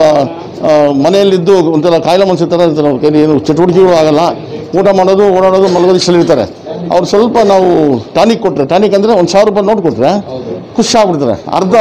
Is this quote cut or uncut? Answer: uncut